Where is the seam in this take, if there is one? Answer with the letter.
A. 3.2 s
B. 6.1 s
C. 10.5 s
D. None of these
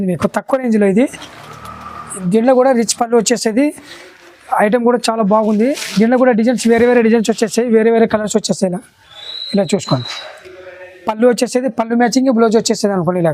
D